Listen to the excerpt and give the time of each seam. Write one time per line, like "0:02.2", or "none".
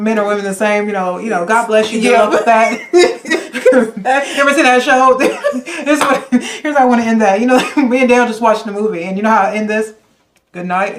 none